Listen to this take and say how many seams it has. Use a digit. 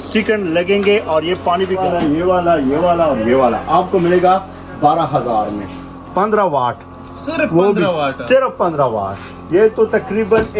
2